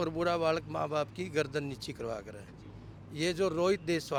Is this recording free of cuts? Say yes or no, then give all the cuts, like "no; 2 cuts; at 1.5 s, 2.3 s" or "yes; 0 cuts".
yes; 0 cuts